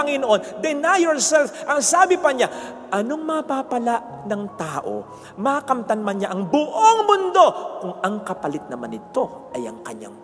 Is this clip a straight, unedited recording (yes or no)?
yes